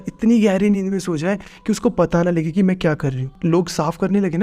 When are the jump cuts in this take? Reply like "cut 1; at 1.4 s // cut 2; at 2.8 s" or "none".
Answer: cut 1; at 3.3 s